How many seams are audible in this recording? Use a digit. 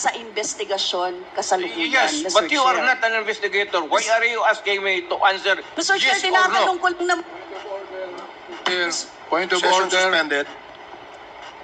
0